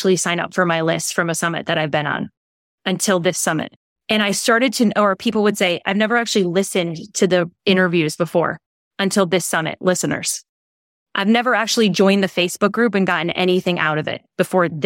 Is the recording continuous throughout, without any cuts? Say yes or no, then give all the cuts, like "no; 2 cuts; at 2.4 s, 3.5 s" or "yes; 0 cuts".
yes; 0 cuts